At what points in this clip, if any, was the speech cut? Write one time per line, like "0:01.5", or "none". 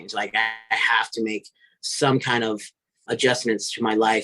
0:02.9

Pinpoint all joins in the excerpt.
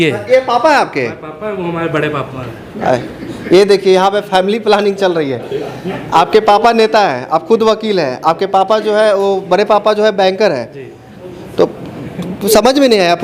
none

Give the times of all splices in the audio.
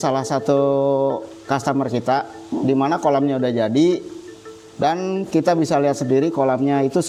none

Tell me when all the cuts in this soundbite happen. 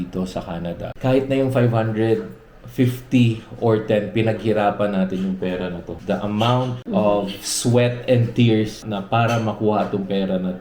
0:00.9
0:05.9
0:06.8
0:08.8

